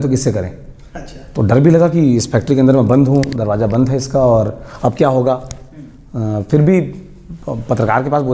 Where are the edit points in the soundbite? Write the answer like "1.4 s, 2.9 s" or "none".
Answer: none